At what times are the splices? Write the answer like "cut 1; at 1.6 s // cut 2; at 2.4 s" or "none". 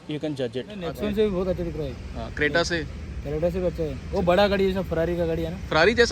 cut 1; at 0.9 s